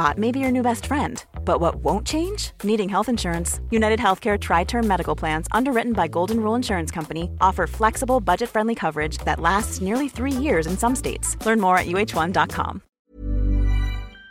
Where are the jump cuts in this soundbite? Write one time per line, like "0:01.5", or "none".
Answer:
0:12.8